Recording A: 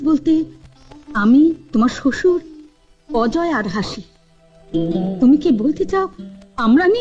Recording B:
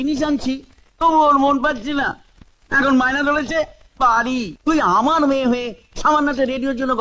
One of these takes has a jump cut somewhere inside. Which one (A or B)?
B